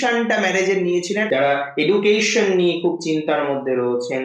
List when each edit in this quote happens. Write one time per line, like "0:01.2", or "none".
0:01.3

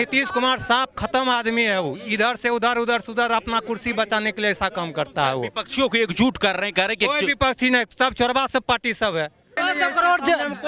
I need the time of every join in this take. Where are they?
0:09.6

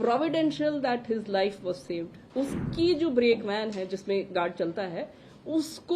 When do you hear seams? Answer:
0:02.2

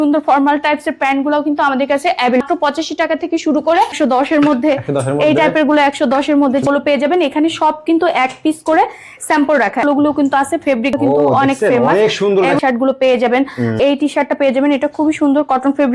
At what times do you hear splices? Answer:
0:02.4
0:04.0
0:06.6
0:09.8
0:11.0
0:12.6
0:13.8

